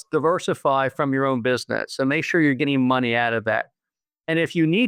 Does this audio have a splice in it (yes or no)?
no